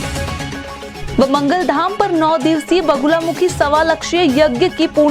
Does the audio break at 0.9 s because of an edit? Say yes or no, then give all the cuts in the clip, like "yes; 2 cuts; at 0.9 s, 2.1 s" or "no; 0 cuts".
no; 0 cuts